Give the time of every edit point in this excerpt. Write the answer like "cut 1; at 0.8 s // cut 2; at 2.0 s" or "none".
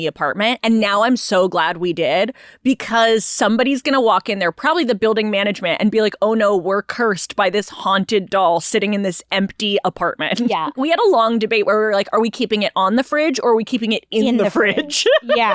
cut 1; at 10.8 s

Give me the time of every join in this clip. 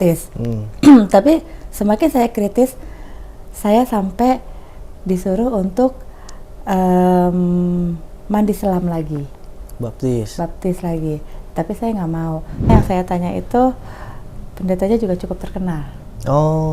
cut 1; at 12.7 s

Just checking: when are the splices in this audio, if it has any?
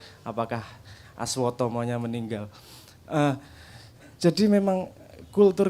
none

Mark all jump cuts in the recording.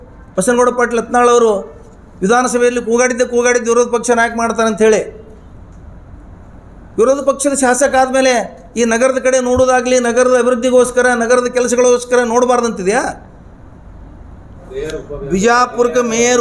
cut 1; at 14.6 s

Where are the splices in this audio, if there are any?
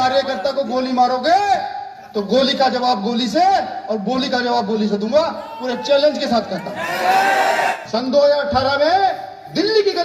cut 1; at 7.8 s

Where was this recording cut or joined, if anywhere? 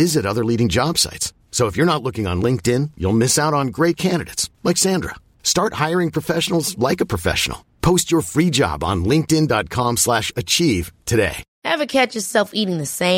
cut 1; at 11.5 s

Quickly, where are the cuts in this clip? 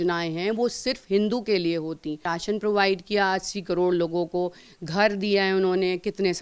cut 1; at 2.3 s

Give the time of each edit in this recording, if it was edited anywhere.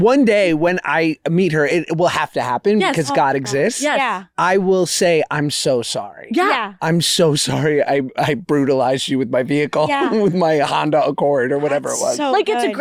none

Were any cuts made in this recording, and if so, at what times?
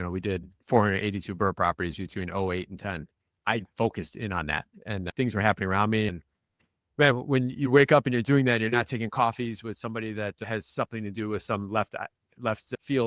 cut 1; at 6.1 s

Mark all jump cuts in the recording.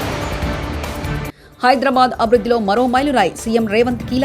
cut 1; at 1.4 s

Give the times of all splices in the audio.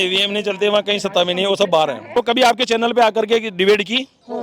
cut 1; at 2.1 s

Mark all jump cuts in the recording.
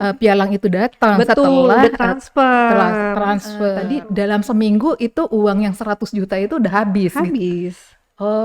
cut 1; at 3.8 s

